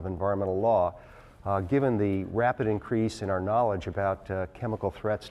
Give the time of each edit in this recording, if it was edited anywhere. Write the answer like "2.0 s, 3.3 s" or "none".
2.8 s